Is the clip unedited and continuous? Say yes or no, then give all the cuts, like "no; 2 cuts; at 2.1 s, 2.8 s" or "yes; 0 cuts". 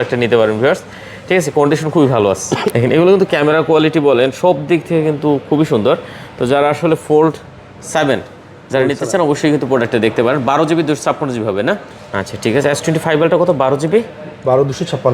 no; 2 cuts; at 2.7 s, 11.9 s